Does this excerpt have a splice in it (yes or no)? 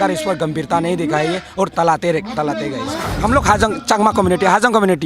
yes